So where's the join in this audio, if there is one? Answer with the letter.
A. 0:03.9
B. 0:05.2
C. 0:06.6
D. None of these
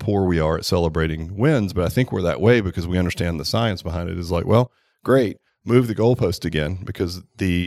B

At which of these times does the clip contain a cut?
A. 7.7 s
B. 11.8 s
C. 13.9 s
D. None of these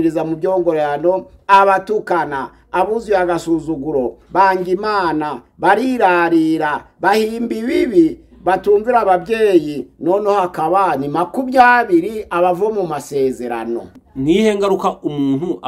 C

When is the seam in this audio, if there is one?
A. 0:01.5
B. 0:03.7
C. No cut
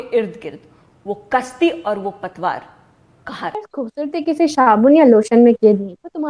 B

